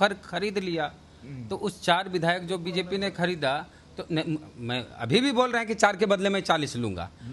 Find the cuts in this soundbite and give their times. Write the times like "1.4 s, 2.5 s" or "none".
none